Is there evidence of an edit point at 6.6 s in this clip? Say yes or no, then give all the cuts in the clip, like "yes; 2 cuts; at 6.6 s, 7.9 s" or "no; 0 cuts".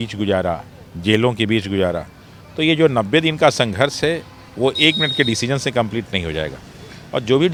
no; 0 cuts